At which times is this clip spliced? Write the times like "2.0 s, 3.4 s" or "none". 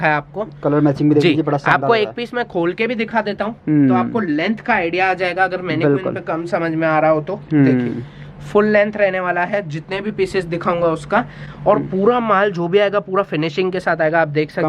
none